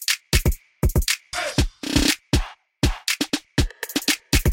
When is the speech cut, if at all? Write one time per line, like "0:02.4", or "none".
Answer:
0:01.3